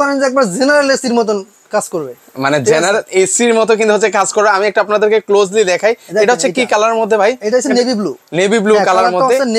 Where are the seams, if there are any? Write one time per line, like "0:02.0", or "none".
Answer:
none